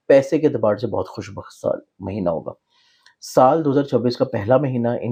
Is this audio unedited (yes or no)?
yes